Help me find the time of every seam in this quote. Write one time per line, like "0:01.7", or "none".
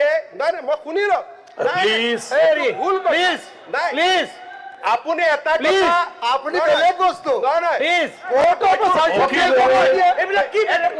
none